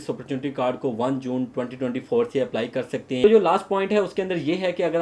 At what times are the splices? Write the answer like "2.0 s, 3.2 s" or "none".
3.2 s